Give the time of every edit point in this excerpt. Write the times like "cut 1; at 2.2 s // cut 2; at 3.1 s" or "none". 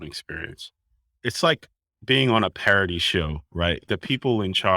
cut 1; at 1.2 s // cut 2; at 3.9 s